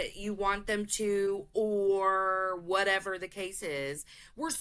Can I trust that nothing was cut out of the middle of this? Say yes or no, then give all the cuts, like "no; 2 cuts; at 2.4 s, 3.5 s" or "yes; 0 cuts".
yes; 0 cuts